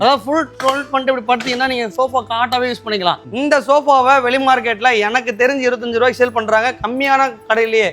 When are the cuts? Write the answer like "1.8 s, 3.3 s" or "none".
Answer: 3.2 s